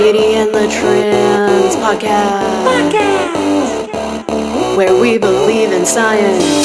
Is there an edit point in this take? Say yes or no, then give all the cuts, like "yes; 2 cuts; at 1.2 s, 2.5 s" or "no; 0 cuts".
no; 0 cuts